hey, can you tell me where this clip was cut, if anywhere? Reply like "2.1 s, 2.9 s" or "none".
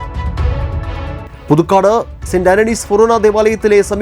1.3 s